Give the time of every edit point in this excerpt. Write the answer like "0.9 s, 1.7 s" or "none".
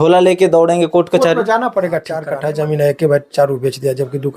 2.2 s